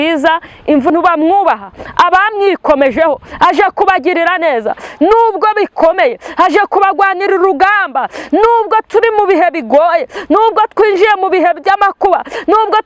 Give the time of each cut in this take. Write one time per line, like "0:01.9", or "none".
0:00.9